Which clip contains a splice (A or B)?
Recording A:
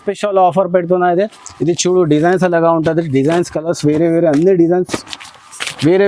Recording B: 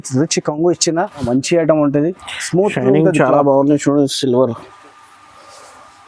B